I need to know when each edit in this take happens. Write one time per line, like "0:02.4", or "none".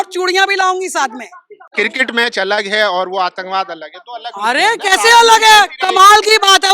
0:01.7